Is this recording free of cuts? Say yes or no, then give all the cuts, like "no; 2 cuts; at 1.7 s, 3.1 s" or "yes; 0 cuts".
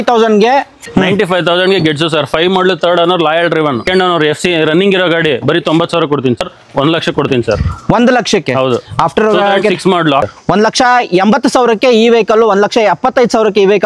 no; 4 cuts; at 0.8 s, 3.8 s, 6.4 s, 10.2 s